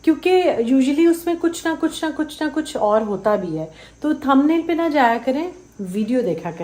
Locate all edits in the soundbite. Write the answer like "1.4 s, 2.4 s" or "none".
none